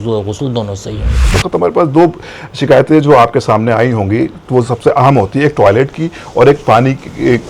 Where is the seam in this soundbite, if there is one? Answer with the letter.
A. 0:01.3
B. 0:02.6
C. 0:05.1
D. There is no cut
A